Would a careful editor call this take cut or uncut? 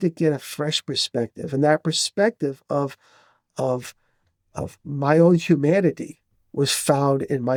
uncut